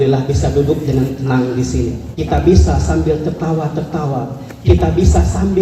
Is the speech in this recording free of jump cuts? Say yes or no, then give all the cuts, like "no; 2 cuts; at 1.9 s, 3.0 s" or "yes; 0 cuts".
no; 1 cut; at 2.1 s